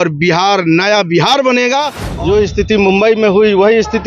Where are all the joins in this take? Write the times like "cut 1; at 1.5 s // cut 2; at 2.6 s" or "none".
cut 1; at 2.0 s

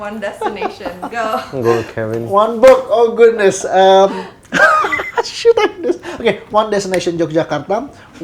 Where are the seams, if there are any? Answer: none

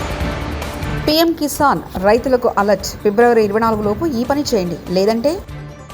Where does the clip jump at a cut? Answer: cut 1; at 1.0 s

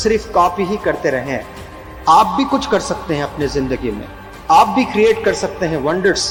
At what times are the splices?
none

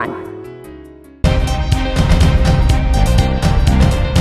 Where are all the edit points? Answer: cut 1; at 1.2 s

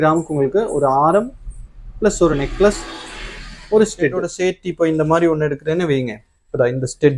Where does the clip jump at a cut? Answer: cut 1; at 4.3 s

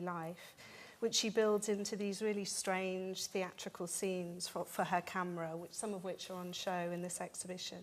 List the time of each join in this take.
cut 1; at 1.6 s

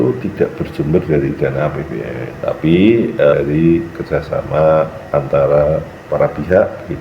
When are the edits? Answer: cut 1; at 2.3 s // cut 2; at 3.3 s // cut 3; at 6.0 s

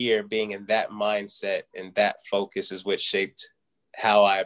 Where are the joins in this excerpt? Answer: none

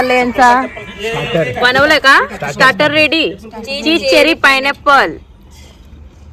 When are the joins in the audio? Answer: none

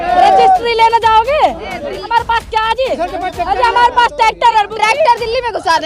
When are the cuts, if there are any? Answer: cut 1; at 2.0 s

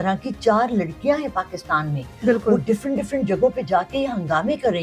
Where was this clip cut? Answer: none

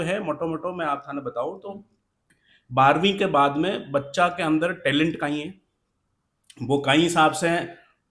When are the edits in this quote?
none

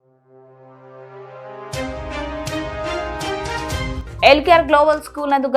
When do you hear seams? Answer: none

